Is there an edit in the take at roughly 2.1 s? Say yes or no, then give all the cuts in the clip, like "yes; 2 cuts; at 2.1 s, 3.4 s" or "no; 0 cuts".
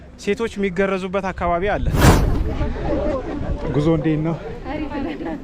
yes; 1 cut; at 2.1 s